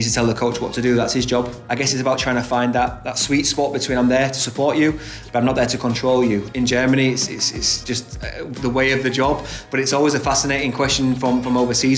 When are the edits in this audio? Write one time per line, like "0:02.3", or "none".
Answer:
0:01.6
0:06.5
0:07.8